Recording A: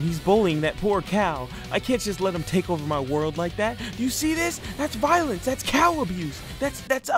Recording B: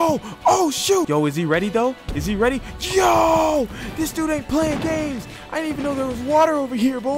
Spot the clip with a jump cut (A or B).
B